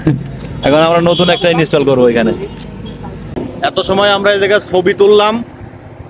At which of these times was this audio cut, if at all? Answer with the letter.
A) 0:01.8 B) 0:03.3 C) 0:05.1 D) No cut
B